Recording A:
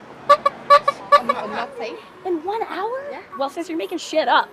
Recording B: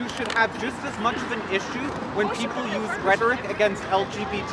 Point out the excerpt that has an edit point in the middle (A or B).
A